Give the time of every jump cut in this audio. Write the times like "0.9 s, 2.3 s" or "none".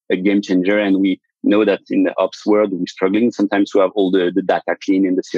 2.8 s